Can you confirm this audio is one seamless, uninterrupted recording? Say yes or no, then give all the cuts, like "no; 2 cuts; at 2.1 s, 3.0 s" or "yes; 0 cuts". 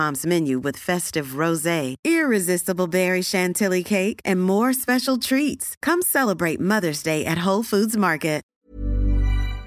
no; 1 cut; at 8.6 s